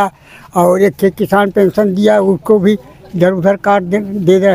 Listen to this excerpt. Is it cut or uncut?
uncut